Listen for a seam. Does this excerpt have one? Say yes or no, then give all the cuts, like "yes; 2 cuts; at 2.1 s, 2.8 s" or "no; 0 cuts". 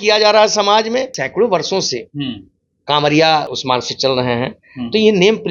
yes; 2 cuts; at 1.2 s, 3.5 s